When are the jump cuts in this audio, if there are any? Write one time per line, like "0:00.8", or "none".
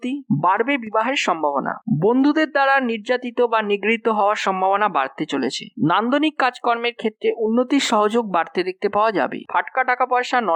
none